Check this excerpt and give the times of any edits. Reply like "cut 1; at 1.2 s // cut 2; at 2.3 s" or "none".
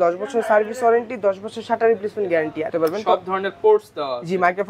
cut 1; at 2.7 s